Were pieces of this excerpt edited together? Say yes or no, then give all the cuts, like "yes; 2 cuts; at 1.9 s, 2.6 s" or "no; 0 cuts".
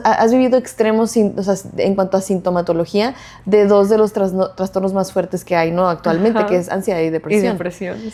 no; 0 cuts